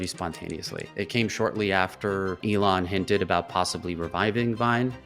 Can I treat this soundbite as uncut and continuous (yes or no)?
no